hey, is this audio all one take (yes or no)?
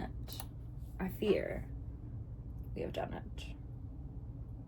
yes